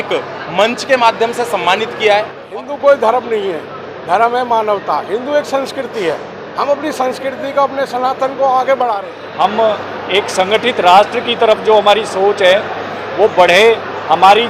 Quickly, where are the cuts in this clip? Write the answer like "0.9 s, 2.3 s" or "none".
2.4 s, 9.2 s